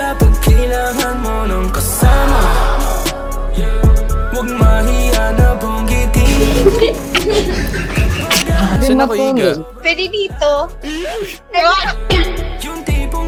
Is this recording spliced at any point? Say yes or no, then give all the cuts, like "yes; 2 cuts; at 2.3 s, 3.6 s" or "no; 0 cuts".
no; 0 cuts